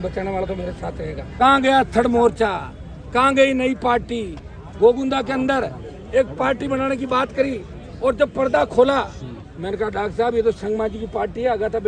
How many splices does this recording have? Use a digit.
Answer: 1